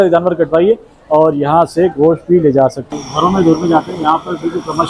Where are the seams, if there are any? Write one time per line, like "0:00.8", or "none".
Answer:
0:02.9